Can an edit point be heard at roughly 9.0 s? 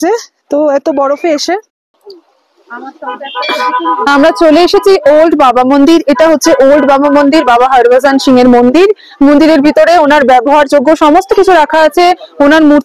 no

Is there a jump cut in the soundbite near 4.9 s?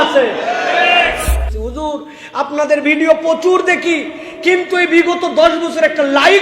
no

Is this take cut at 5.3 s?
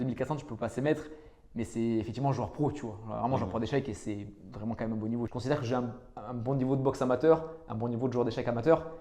yes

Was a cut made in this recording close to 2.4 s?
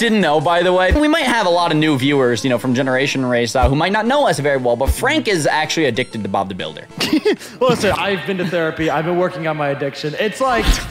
no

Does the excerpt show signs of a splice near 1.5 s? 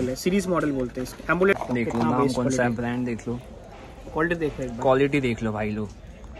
yes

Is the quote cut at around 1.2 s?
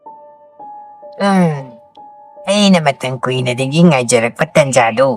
yes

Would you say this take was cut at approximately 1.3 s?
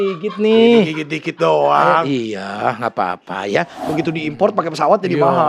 no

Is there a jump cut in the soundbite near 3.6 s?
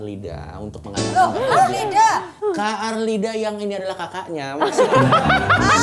no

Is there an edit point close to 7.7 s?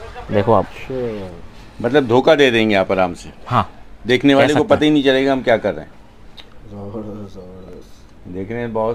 no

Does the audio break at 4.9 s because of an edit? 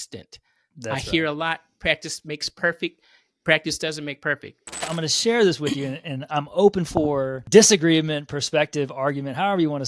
yes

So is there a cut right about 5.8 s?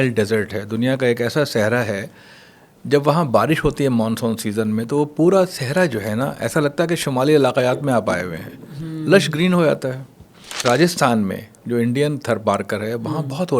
no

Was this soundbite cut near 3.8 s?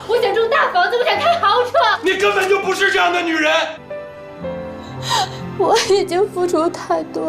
yes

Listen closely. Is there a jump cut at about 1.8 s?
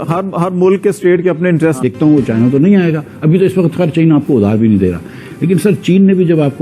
yes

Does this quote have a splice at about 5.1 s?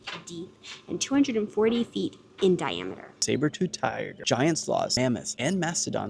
yes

